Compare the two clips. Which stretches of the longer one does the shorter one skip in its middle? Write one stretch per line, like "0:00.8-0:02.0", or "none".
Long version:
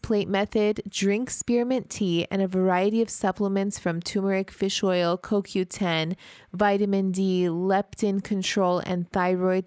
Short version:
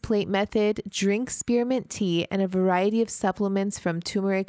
none